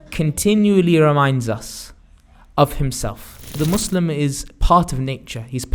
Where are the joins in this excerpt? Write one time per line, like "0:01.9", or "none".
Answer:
0:03.5